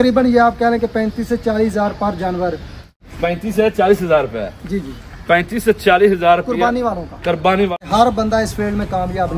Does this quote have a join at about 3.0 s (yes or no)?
yes